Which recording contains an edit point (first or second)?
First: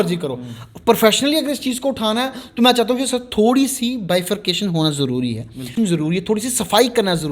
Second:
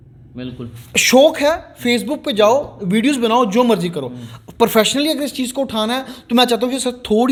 first